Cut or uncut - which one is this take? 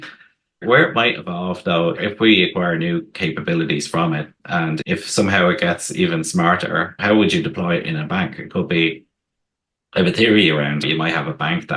cut